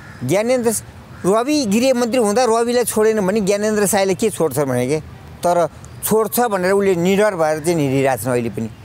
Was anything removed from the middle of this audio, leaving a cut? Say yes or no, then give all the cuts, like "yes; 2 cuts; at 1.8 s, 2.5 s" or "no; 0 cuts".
no; 0 cuts